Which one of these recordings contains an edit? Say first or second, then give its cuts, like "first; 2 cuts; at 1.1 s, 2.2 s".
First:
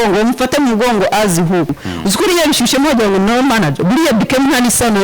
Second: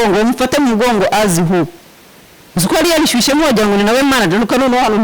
first; 1 cut; at 1.9 s